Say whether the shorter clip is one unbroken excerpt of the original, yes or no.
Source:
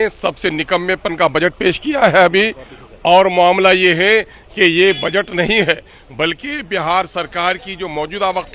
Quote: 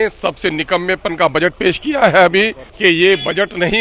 no